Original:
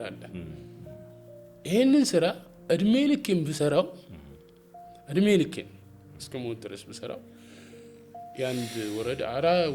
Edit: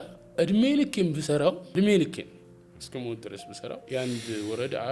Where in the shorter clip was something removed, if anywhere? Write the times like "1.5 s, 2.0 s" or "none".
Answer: 1.6 s, 3.8 s